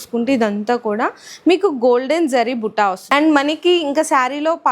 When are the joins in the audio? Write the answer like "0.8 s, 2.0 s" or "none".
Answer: 3.1 s